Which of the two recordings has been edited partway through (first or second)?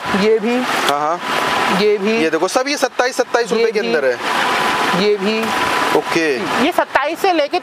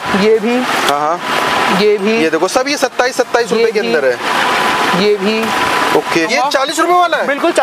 second